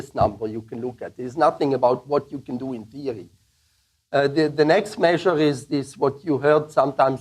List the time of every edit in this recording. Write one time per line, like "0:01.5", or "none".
none